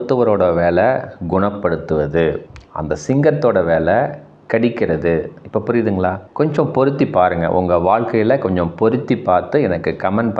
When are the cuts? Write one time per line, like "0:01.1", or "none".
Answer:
none